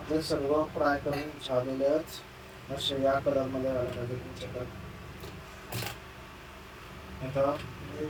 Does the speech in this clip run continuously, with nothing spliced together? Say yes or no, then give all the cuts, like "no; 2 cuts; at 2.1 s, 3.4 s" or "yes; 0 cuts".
yes; 0 cuts